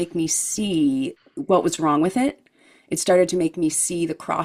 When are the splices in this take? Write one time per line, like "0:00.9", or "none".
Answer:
none